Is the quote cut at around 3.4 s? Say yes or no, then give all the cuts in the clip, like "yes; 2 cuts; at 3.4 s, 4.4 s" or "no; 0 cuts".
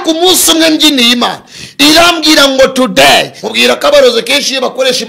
yes; 1 cut; at 3.4 s